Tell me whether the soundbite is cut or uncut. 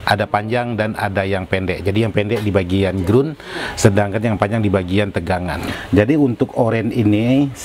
cut